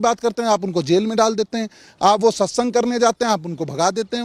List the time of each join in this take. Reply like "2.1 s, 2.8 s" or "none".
none